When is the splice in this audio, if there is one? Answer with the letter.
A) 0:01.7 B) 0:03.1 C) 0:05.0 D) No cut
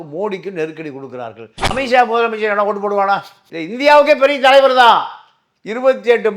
A